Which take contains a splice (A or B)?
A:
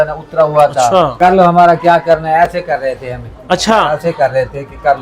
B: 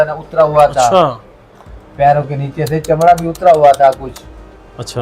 A